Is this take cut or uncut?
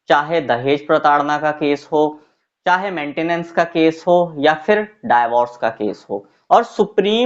cut